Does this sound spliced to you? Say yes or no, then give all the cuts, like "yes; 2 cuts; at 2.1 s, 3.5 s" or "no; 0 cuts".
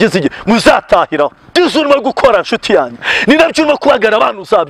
yes; 1 cut; at 1.5 s